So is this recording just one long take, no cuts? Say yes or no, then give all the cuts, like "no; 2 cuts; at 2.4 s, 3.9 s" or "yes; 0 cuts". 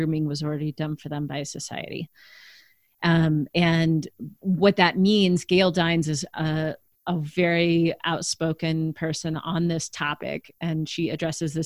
yes; 0 cuts